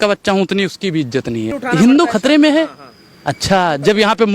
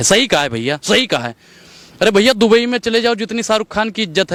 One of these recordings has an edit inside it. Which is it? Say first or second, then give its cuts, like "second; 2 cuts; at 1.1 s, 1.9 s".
first; 1 cut; at 1.6 s